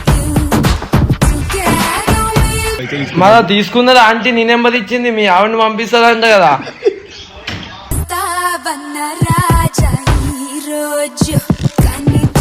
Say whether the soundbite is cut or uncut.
cut